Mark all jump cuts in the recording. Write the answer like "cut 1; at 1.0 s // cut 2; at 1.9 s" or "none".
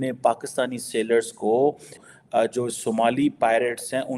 cut 1; at 2.0 s